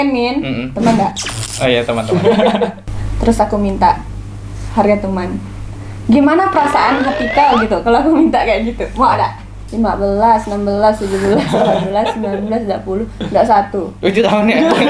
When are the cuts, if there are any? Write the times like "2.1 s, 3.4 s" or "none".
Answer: 2.8 s, 9.6 s